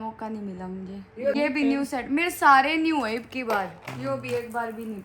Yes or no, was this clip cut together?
yes